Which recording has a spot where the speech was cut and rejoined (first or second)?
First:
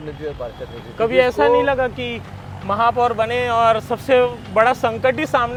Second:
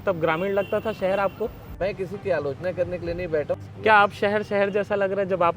second